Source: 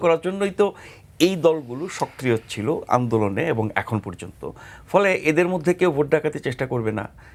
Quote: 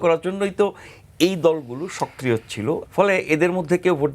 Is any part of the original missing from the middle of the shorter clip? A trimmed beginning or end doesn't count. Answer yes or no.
yes